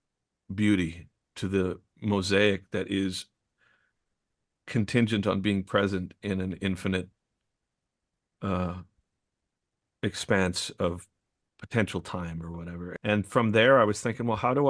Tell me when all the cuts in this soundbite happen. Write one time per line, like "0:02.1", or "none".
0:12.9